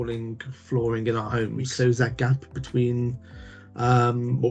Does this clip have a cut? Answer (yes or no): yes